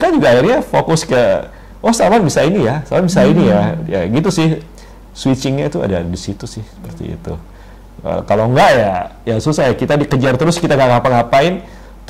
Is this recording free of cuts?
yes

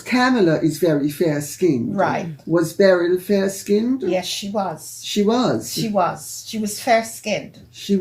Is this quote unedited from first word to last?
yes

